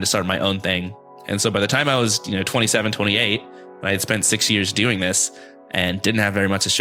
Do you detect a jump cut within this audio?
no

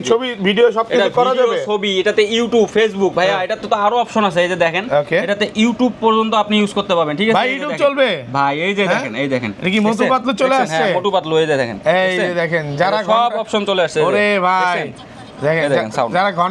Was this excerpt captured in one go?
yes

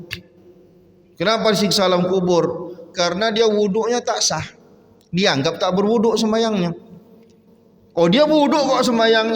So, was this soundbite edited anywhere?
no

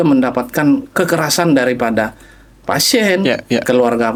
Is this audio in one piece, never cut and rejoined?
yes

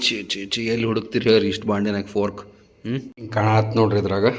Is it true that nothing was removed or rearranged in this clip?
no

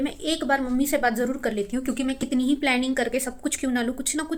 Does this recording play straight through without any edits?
yes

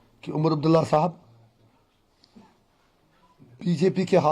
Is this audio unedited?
yes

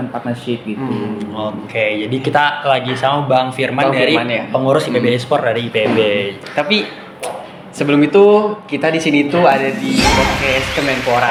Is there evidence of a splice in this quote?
no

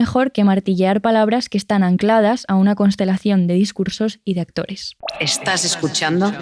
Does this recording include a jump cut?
yes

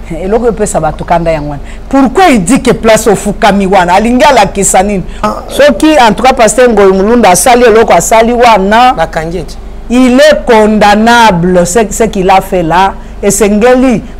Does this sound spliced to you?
yes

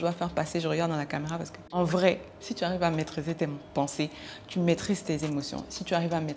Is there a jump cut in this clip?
yes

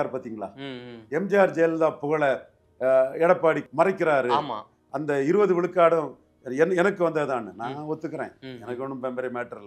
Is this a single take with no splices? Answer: no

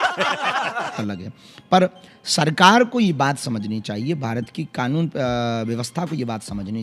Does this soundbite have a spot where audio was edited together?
yes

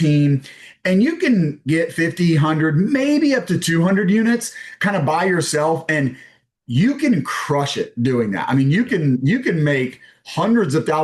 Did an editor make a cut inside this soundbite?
no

